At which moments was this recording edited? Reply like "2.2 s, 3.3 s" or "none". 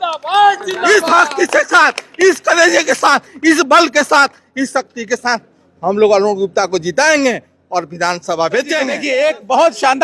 9.0 s